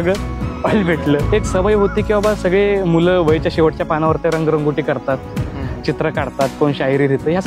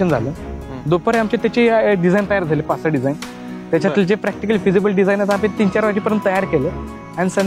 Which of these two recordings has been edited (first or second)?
first